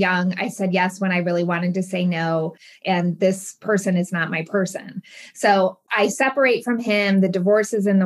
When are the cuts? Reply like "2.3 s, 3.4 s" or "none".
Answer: 2.7 s, 5.8 s